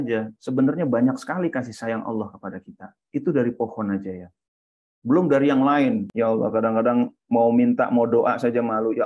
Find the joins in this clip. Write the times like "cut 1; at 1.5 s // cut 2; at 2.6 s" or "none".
cut 1; at 6.1 s

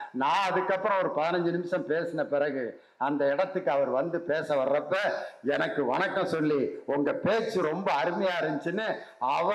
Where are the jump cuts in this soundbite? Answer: none

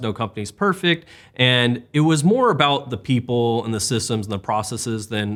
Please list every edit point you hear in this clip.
none

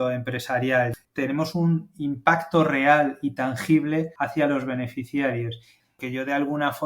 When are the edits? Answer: cut 1; at 0.9 s // cut 2; at 4.1 s // cut 3; at 5.9 s

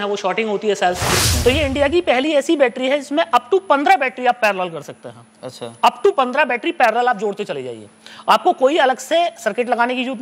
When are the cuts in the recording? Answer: cut 1; at 1.2 s

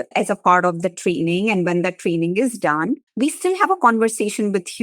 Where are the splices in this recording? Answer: cut 1; at 3.1 s

